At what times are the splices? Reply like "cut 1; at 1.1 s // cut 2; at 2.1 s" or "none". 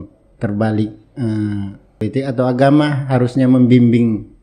cut 1; at 2.0 s